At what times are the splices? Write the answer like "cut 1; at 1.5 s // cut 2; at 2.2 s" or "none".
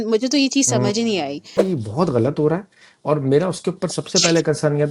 cut 1; at 1.6 s